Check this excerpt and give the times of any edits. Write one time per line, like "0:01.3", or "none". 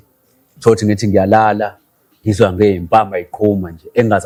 none